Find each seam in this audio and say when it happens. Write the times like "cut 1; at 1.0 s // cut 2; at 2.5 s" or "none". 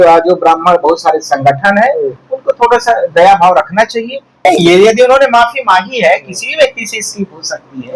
cut 1; at 4.4 s

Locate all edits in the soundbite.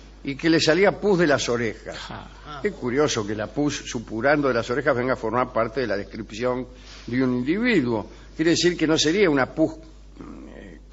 cut 1; at 4.6 s

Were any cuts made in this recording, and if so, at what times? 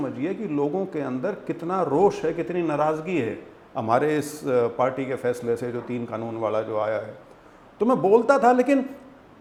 none

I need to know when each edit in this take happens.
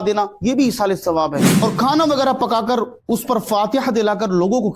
cut 1; at 1.5 s

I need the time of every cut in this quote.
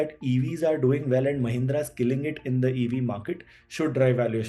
none

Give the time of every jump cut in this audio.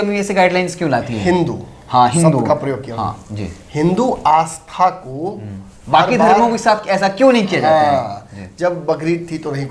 none

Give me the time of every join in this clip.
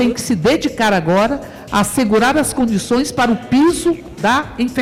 none

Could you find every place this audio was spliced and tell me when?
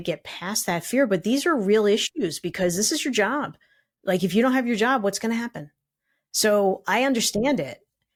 none

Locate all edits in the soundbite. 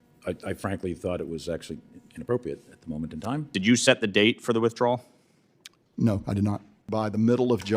cut 1; at 3.5 s // cut 2; at 6.9 s

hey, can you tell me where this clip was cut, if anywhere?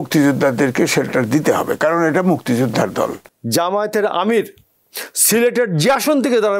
cut 1; at 3.3 s

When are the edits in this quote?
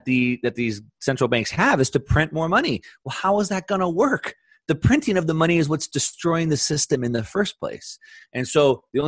none

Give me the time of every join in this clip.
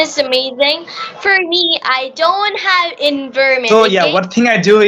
cut 1; at 3.6 s

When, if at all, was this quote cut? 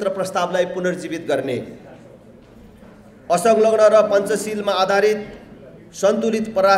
none

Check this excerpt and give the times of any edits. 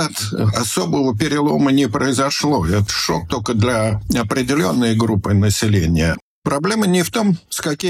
cut 1; at 2.8 s // cut 2; at 6.3 s

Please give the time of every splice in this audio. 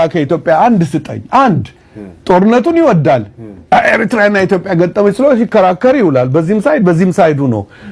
none

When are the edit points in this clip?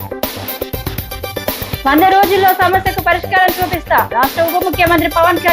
cut 1; at 1.7 s

